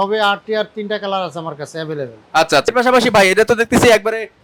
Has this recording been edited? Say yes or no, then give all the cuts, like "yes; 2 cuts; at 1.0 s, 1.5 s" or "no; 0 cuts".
yes; 1 cut; at 2.7 s